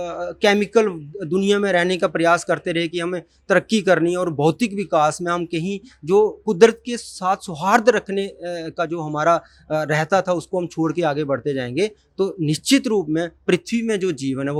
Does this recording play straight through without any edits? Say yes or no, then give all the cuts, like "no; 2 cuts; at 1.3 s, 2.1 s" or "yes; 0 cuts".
yes; 0 cuts